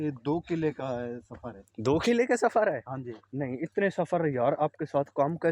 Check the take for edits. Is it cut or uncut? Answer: uncut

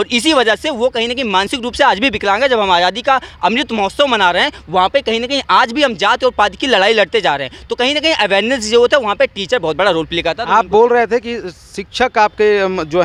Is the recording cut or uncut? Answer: uncut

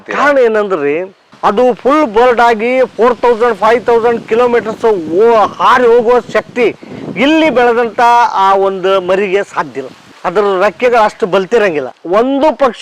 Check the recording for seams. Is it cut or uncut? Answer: cut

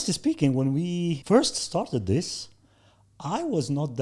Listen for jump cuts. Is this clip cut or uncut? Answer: cut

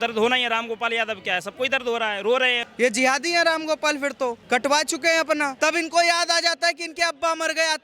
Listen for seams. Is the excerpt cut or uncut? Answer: cut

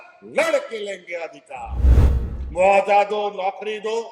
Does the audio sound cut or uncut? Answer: cut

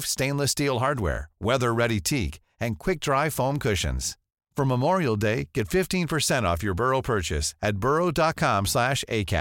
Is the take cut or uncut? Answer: uncut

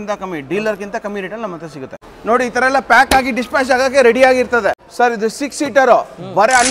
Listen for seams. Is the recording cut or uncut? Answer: cut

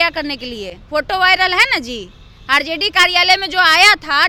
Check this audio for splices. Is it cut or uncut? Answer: uncut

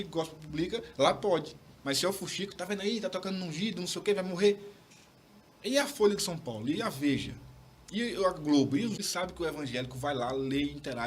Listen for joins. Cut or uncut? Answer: cut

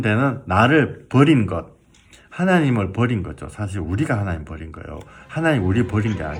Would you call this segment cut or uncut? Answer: uncut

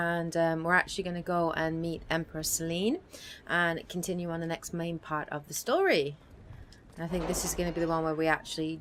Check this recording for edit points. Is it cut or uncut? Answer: uncut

